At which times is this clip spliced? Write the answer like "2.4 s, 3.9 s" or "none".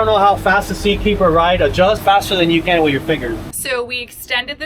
2.0 s, 3.5 s